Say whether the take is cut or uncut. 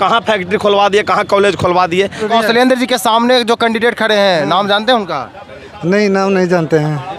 cut